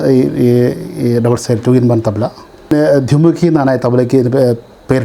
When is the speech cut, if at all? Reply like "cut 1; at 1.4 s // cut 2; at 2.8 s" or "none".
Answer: cut 1; at 2.7 s

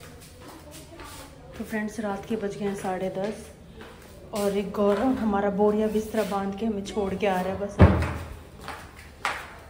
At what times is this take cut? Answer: none

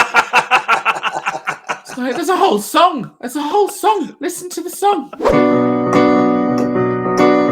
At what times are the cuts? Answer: cut 1; at 5.2 s

